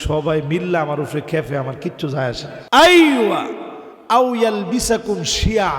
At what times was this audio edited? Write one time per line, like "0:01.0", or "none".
0:02.5